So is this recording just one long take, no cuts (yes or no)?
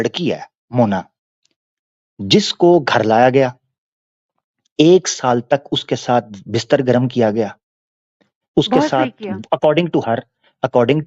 yes